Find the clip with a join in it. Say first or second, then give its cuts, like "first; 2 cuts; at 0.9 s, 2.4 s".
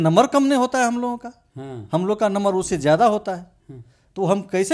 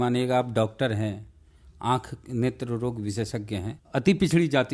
second; 1 cut; at 3.8 s